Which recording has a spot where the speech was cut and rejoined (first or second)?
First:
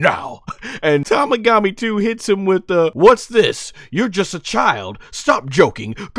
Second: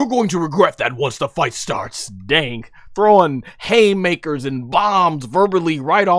first